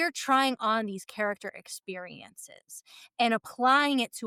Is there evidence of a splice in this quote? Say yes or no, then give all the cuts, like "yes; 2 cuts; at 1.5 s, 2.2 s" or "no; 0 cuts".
no; 0 cuts